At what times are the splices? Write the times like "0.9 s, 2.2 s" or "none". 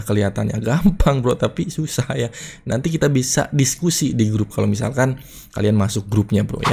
none